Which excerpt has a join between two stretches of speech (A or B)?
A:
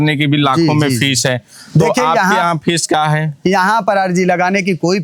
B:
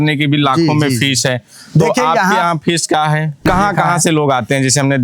B